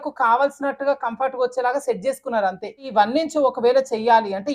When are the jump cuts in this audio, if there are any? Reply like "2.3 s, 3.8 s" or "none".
2.9 s

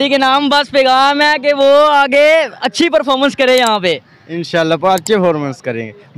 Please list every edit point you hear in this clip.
none

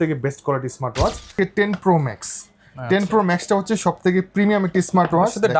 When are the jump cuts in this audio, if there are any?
1.3 s

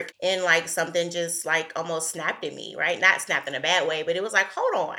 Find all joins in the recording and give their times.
none

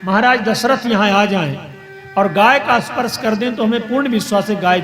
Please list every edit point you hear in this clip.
none

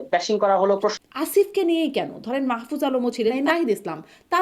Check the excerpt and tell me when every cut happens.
0.9 s, 3.4 s

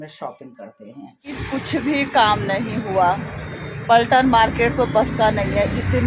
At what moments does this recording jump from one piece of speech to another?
1.4 s

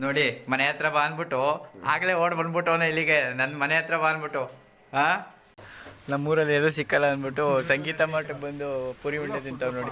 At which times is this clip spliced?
5.7 s

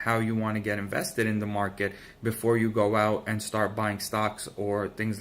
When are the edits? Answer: 2.1 s

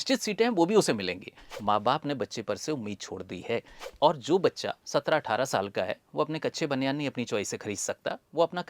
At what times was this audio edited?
1.5 s, 3.8 s

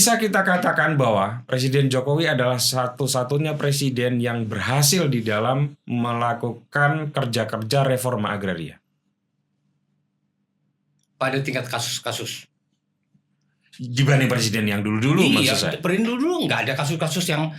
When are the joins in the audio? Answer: none

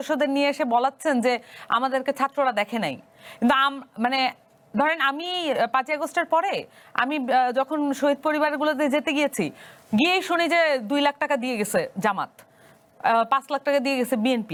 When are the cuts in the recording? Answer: none

